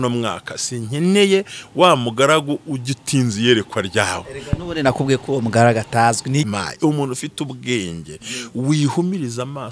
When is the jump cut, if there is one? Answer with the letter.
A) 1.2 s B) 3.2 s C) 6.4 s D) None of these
C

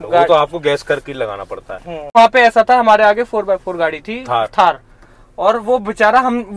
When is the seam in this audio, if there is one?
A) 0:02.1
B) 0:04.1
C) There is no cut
A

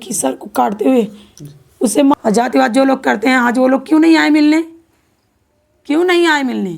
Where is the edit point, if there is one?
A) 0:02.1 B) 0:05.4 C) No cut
A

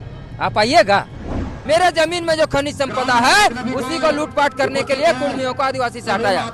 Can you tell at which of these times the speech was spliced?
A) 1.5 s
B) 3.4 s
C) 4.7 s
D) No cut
A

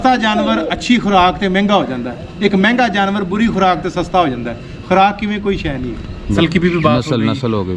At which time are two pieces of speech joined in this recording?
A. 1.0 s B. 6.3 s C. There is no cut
C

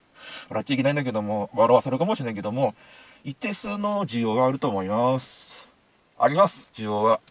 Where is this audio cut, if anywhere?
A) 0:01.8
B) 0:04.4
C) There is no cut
C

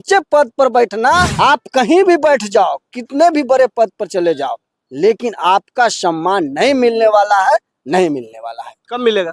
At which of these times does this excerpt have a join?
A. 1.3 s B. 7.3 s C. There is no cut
A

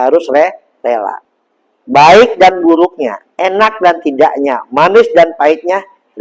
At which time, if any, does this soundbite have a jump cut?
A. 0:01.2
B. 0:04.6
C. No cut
A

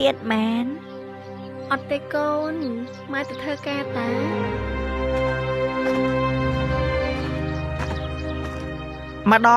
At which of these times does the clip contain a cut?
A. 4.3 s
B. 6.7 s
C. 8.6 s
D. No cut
A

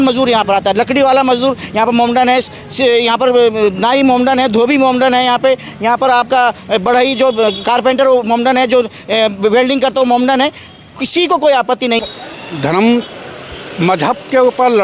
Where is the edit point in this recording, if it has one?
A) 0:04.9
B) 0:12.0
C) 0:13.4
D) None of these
B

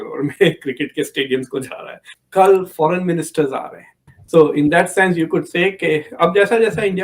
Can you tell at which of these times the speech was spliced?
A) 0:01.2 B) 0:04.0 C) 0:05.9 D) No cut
B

